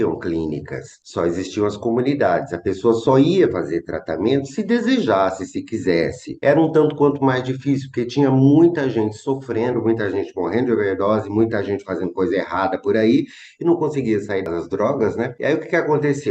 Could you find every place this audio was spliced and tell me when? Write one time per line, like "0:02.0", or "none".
none